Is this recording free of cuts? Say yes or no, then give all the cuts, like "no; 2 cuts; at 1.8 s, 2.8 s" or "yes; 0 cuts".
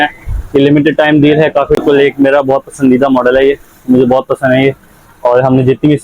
no; 1 cut; at 1.8 s